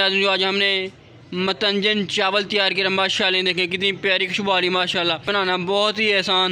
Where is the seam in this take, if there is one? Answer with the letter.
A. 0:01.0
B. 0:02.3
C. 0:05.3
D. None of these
C